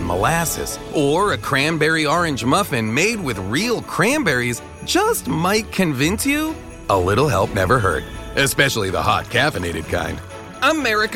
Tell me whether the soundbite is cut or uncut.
uncut